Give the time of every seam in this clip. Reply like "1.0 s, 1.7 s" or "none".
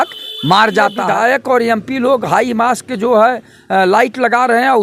1.0 s